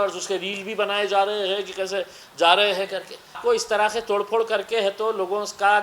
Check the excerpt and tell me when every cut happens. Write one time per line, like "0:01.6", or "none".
0:03.4